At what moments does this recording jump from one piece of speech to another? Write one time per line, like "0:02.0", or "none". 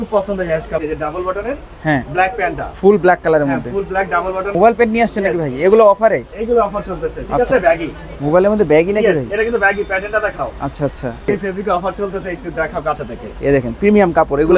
0:00.8
0:04.5
0:07.5
0:11.3